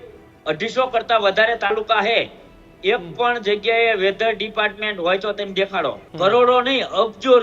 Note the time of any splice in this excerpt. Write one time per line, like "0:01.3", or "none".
0:06.0